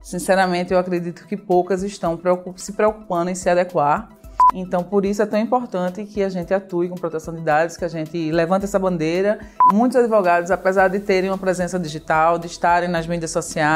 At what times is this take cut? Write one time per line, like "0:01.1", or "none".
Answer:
0:04.5
0:09.6